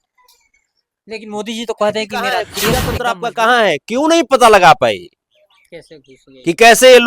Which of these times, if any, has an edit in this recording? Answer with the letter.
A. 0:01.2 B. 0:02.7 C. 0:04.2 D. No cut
B